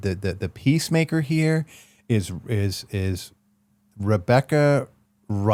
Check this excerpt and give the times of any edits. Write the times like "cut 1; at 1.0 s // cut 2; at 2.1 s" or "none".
none